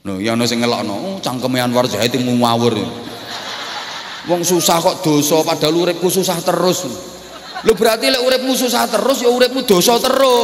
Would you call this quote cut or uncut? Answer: uncut